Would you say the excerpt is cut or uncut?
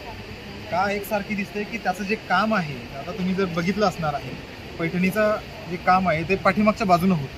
uncut